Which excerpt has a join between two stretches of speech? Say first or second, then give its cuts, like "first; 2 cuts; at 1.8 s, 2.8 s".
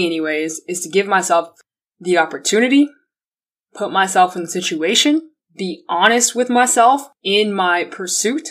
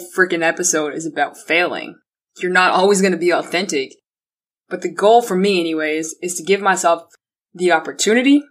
first; 1 cut; at 5.4 s